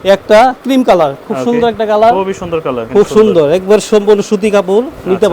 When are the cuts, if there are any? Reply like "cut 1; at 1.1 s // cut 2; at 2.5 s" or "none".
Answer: cut 1; at 2.8 s